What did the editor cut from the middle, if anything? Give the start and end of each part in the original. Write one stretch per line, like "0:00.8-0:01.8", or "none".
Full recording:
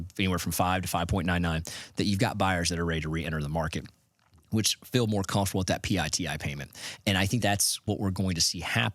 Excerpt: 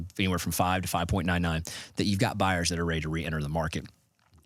none